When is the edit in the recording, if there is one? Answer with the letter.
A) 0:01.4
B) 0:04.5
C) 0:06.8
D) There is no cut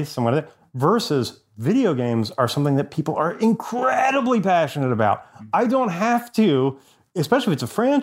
D